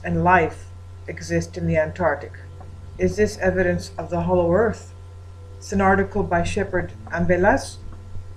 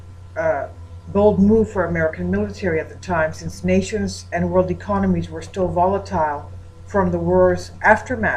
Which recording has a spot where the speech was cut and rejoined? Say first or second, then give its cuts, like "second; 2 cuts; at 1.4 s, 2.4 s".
second; 1 cut; at 1.6 s